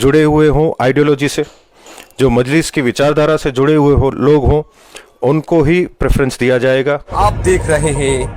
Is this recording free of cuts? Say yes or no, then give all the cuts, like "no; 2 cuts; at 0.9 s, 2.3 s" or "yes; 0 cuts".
no; 1 cut; at 6.9 s